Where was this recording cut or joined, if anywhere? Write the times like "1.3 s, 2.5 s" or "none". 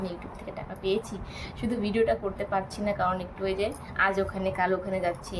none